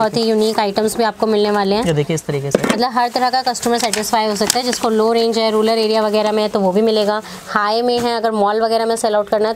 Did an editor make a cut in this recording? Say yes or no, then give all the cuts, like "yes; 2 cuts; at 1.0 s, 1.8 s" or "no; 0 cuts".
no; 0 cuts